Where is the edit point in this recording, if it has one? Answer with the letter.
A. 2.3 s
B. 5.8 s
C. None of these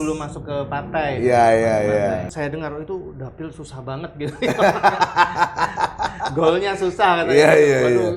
A